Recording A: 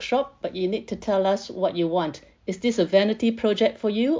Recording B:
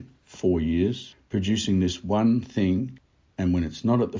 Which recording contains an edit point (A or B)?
B